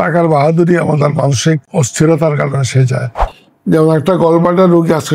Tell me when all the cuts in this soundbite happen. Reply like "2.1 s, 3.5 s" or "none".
1.6 s, 3.2 s